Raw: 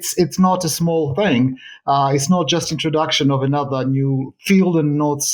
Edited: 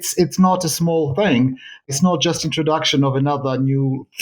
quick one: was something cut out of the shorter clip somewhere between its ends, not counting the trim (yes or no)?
yes